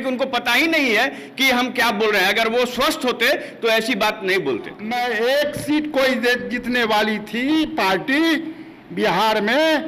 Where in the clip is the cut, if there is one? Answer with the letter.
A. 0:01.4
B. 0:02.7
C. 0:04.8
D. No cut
C